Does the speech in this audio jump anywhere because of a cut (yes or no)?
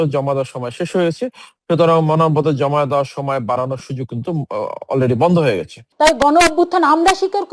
yes